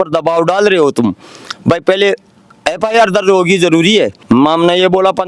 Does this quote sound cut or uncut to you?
cut